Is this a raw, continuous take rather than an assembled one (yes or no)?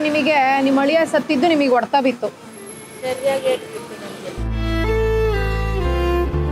yes